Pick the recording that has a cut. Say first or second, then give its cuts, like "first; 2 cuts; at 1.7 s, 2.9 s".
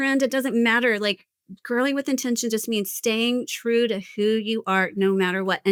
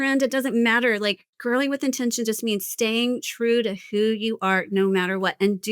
second; 1 cut; at 1.3 s